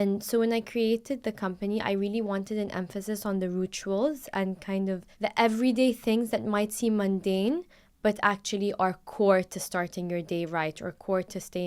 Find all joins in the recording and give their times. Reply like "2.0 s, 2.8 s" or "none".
5.1 s